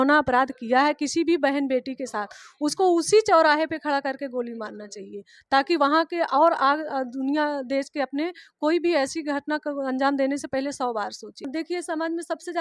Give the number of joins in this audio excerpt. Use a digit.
1